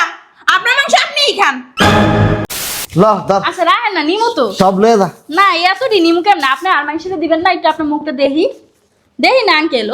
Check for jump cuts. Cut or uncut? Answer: cut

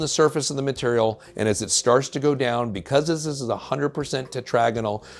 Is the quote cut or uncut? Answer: uncut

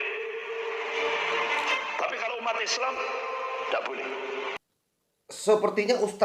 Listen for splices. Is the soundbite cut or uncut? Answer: cut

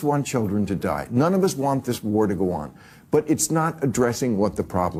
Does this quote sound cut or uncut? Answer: uncut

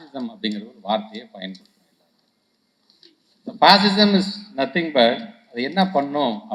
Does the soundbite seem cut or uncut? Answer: uncut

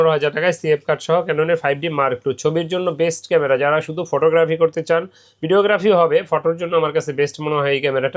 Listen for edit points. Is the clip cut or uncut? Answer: uncut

